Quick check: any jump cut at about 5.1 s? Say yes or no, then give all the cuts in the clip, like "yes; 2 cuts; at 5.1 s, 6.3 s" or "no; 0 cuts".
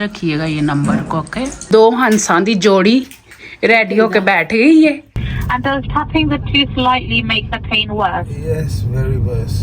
yes; 2 cuts; at 1.6 s, 5.1 s